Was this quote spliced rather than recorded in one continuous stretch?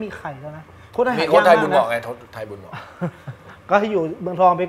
no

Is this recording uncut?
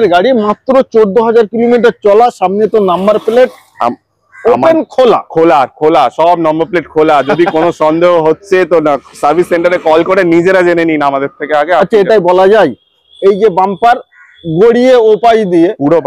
yes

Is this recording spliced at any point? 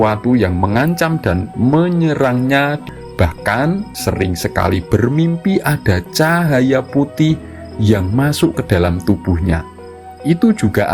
yes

